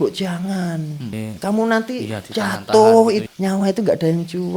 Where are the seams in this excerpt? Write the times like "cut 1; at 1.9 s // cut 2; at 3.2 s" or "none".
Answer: cut 1; at 1.1 s // cut 2; at 3.3 s